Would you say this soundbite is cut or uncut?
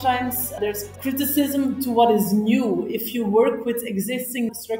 cut